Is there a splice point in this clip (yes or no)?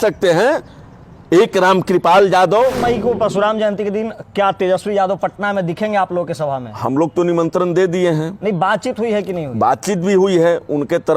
yes